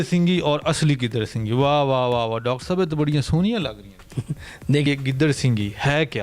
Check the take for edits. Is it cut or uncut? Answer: cut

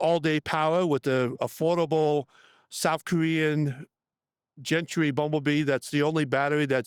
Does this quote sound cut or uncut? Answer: uncut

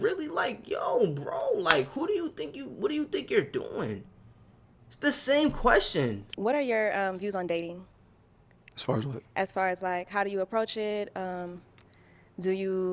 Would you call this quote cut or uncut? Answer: cut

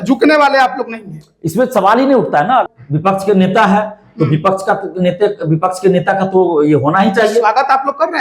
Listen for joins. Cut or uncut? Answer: cut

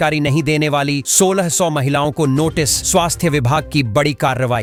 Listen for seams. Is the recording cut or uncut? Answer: uncut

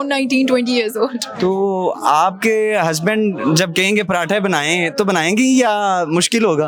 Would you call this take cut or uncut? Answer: uncut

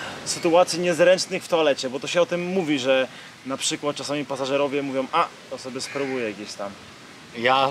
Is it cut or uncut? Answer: uncut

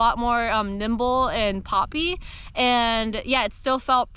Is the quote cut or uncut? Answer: uncut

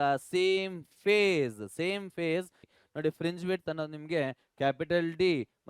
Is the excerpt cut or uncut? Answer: cut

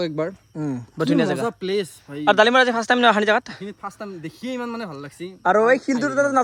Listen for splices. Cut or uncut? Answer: uncut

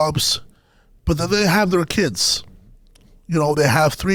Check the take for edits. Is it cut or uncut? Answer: uncut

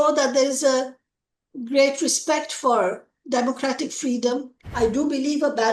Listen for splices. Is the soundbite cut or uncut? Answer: cut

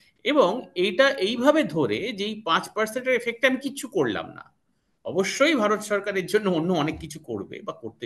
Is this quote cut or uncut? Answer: uncut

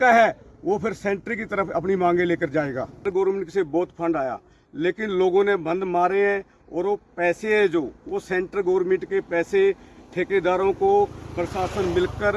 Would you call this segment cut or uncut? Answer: cut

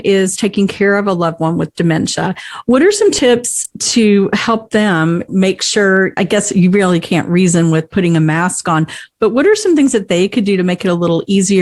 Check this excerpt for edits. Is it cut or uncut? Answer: uncut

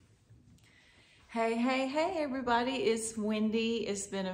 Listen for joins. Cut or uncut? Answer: uncut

